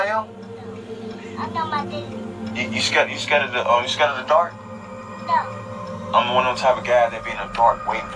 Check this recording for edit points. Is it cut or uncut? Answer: uncut